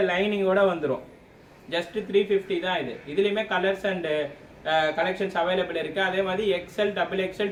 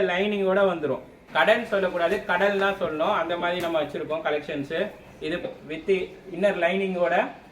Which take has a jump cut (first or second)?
second